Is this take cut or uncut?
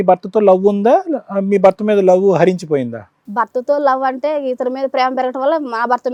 uncut